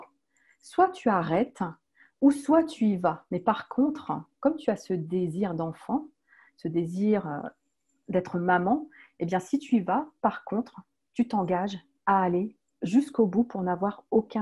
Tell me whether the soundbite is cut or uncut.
uncut